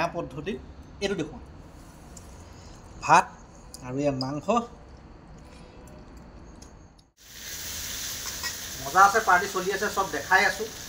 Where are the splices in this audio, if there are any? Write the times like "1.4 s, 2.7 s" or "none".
7.1 s